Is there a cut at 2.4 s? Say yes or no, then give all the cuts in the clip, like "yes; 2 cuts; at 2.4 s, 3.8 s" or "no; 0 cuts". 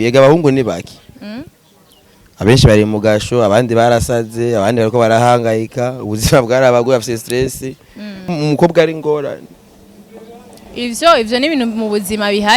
no; 1 cut; at 8.2 s